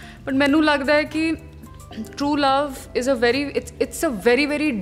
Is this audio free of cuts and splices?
yes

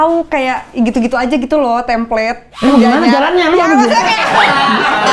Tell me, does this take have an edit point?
no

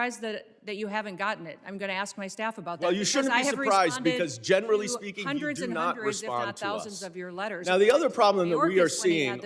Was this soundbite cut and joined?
no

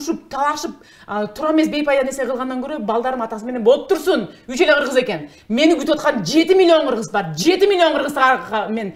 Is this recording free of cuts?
yes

